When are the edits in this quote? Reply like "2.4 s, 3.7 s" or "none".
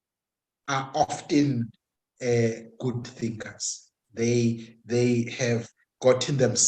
none